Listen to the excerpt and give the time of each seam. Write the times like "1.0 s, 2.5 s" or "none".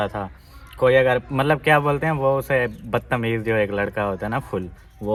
none